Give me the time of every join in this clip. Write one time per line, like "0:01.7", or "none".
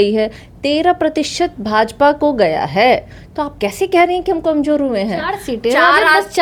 none